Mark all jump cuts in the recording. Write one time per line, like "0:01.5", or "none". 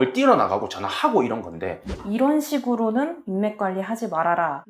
0:01.9